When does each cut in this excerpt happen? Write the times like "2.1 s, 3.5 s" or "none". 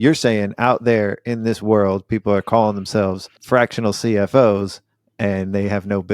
3.3 s